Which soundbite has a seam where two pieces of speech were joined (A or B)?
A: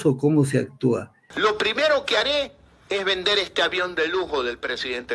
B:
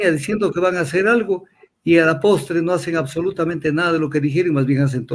A